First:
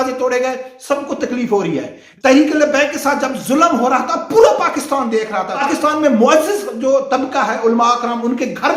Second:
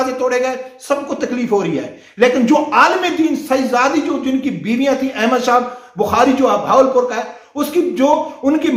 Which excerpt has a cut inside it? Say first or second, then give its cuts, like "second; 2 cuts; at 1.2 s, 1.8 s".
first; 2 cuts; at 2.0 s, 5.6 s